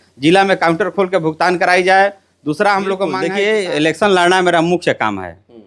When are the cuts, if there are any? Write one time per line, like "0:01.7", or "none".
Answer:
0:03.2

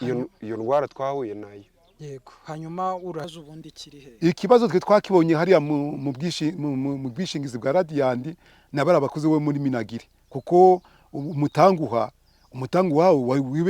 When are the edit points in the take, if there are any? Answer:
0:03.3

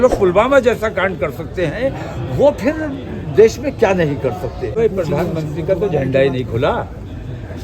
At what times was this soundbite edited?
0:04.7

